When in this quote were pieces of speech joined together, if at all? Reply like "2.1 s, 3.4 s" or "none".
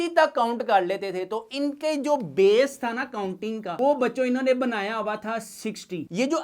none